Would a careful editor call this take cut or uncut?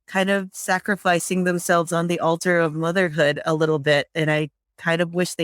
uncut